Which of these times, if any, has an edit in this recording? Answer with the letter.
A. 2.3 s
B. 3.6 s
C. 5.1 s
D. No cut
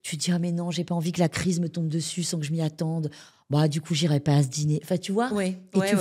D